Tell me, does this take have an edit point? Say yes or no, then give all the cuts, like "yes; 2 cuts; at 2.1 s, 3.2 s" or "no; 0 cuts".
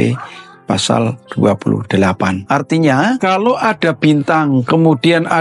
yes; 3 cuts; at 1.2 s, 2.4 s, 3.2 s